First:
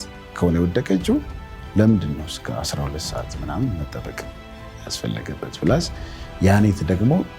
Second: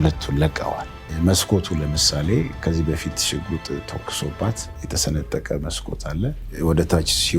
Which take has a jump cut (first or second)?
second